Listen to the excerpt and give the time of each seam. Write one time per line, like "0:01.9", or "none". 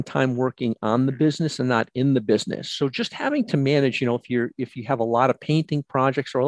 none